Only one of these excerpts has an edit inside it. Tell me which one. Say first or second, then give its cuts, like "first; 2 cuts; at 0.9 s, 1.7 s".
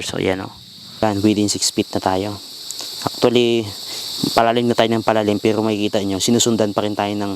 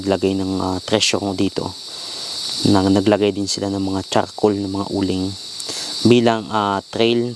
first; 1 cut; at 1.0 s